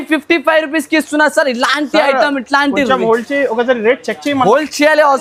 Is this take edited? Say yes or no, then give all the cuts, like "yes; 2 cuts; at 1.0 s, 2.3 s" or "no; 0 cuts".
no; 0 cuts